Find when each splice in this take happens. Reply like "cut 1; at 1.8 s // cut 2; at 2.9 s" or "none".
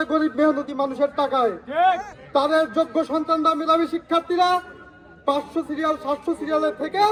none